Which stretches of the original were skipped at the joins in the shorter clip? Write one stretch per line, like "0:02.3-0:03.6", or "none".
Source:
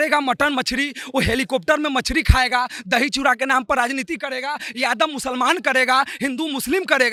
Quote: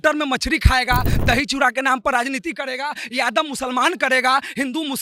none